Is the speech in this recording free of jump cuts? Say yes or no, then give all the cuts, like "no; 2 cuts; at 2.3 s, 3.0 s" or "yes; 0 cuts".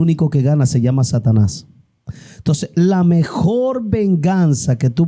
yes; 0 cuts